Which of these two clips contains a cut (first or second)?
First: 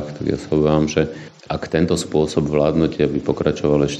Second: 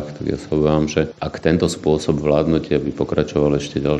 second